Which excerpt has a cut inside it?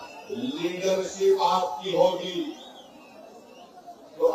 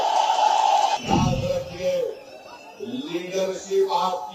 second; 1 cut; at 1.0 s

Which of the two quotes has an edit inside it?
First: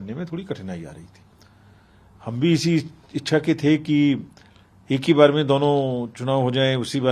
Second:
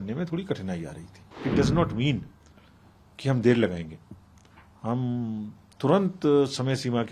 second; 1 cut; at 1.2 s

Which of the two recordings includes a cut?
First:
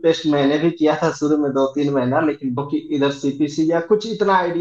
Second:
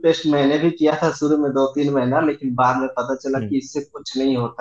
first; 1 cut; at 2.6 s

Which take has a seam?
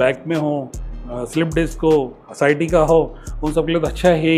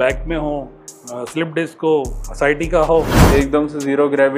second; 1 cut; at 3.2 s

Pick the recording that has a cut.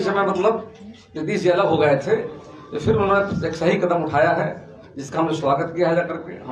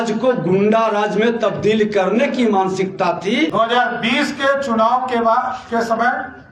second; 1 cut; at 3.5 s

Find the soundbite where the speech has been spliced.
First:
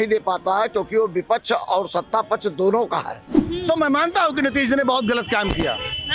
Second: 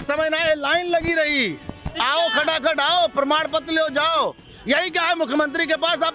first; 1 cut; at 3.3 s

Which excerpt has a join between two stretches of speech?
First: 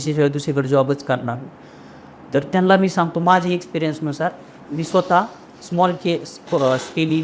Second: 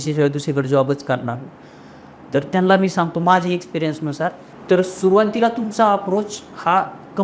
second; 1 cut; at 4.5 s

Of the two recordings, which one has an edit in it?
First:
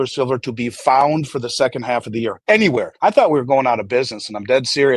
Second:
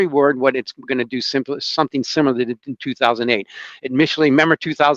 first; 2 cuts; at 2.4 s, 2.9 s

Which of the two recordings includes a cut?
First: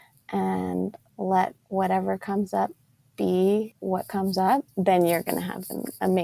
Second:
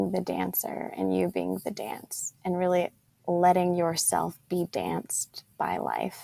first; 3 cuts; at 1.6 s, 3.8 s, 4.7 s

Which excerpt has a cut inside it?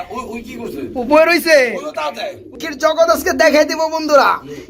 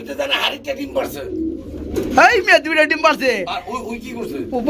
first; 1 cut; at 2.6 s

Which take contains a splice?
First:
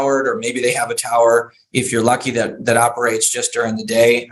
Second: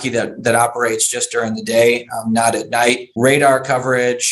second; 1 cut; at 3.1 s

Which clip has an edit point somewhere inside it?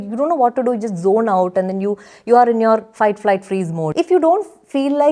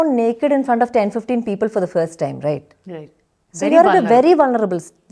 first; 1 cut; at 3.9 s

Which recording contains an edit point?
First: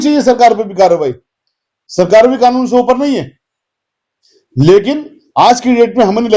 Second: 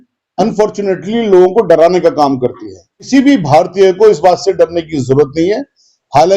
second; 1 cut; at 2.9 s

